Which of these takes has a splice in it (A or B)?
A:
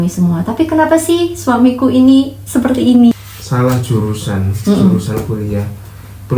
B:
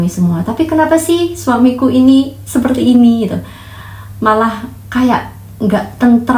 A